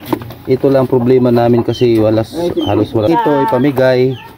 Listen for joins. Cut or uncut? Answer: cut